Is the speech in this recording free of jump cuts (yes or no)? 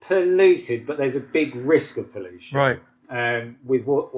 yes